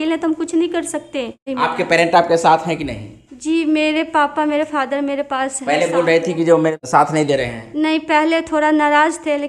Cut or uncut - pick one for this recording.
cut